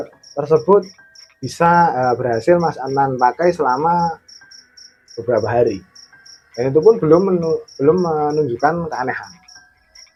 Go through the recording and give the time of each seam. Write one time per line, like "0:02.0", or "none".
none